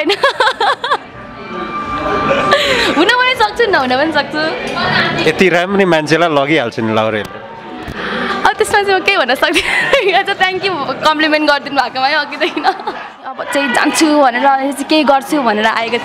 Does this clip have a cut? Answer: yes; 1 cut; at 13.4 s

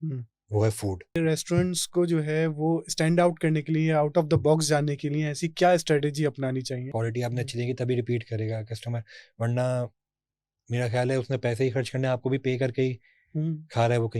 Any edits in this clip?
yes; 2 cuts; at 1.2 s, 6.9 s

